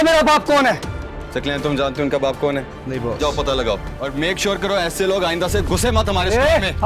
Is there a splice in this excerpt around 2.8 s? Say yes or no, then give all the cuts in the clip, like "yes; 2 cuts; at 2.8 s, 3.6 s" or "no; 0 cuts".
yes; 2 cuts; at 2.8 s, 4.0 s